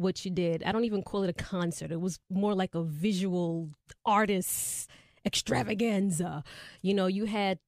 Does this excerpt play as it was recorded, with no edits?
no; 1 cut; at 2.9 s

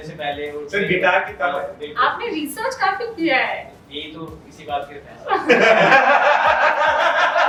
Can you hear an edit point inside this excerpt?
no; 0 cuts

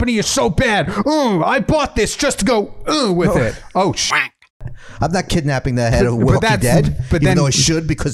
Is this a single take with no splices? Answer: no; 1 cut; at 4.6 s

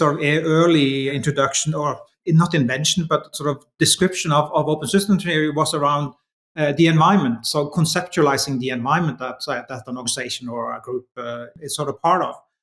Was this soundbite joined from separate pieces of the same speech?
yes; 3 cuts; at 1.1 s, 2.1 s, 11.5 s

